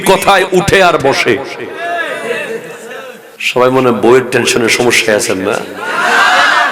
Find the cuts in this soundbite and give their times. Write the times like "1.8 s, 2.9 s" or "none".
3.2 s